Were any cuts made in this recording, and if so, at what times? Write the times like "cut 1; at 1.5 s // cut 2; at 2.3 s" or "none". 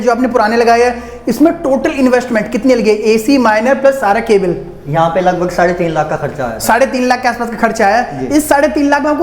none